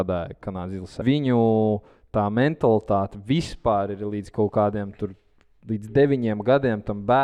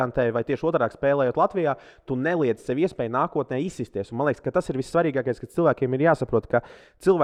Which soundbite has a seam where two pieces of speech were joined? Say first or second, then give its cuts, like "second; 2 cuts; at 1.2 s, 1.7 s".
first; 1 cut; at 1.0 s